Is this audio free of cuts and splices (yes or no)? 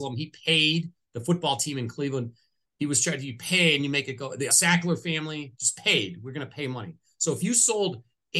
no